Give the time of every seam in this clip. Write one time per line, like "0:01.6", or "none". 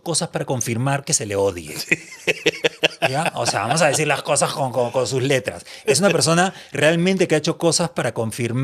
none